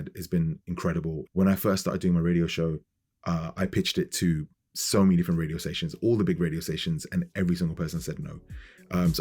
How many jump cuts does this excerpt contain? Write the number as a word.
one